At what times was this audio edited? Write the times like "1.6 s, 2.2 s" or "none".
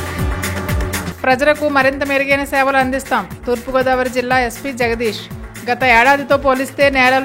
0.9 s